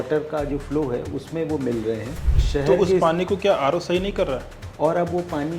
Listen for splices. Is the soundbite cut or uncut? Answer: cut